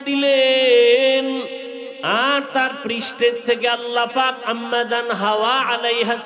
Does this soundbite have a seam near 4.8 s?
no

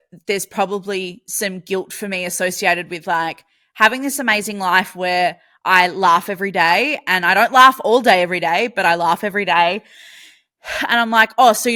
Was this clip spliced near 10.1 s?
no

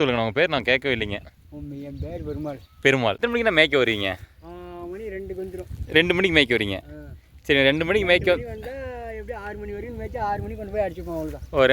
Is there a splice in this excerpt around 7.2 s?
no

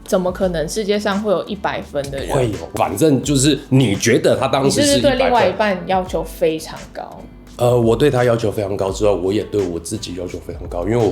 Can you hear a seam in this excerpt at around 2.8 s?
no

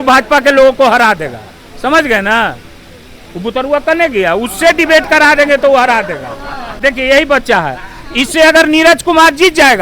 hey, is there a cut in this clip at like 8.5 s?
no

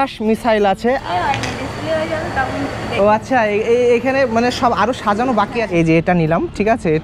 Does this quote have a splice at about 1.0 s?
yes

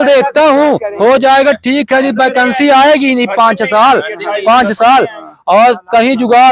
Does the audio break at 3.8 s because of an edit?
no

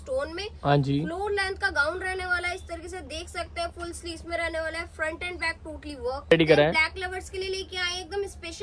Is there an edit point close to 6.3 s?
yes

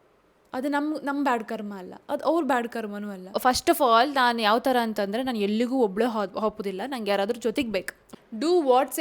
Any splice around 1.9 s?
no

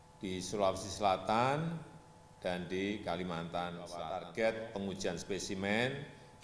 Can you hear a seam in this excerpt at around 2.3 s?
no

